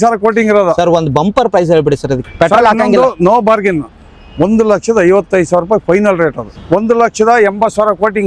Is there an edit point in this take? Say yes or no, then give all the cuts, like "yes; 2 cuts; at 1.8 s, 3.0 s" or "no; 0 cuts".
yes; 2 cuts; at 2.2 s, 6.5 s